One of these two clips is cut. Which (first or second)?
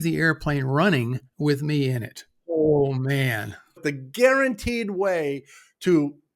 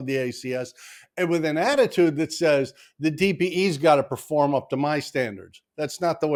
first